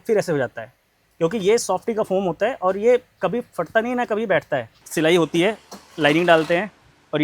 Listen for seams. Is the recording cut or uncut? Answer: cut